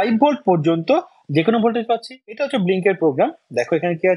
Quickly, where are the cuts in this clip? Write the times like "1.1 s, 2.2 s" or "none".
2.4 s